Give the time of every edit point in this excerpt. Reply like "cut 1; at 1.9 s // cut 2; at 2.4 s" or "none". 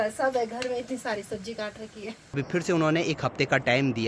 cut 1; at 2.3 s